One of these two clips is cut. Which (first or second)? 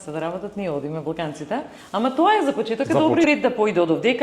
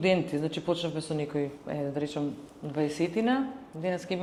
first